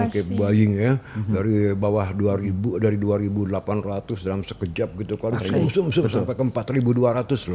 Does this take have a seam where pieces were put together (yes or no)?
no